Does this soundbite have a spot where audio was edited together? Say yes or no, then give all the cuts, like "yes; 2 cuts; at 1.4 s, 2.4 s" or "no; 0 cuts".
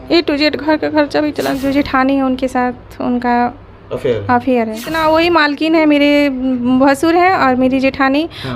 yes; 2 cuts; at 1.6 s, 4.9 s